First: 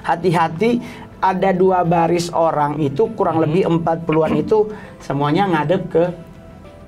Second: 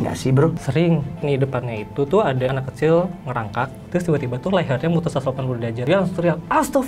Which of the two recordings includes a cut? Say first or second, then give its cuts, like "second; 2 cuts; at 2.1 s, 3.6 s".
second; 4 cuts; at 1.1 s, 2.6 s, 3.8 s, 5.8 s